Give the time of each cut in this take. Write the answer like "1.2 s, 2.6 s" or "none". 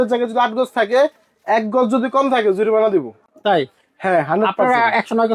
none